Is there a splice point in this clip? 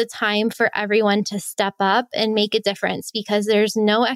no; 0 cuts

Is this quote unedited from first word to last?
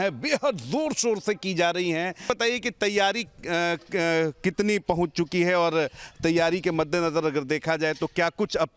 no; 1 cut; at 2.3 s

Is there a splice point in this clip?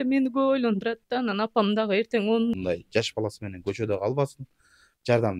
yes; 1 cut; at 2.5 s

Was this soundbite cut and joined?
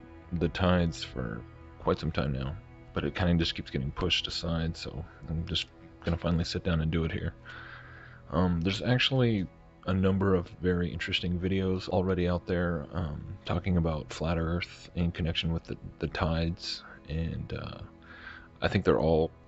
yes; 1 cut; at 4.9 s

